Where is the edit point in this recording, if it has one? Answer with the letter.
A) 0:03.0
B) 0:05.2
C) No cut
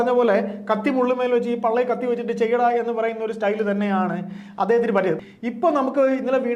B